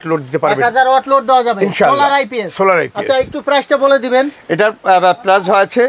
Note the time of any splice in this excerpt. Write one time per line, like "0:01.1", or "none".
none